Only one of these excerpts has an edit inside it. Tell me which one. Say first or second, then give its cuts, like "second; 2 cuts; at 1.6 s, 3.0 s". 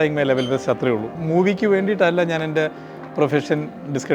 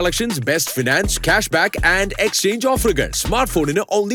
first; 1 cut; at 1.1 s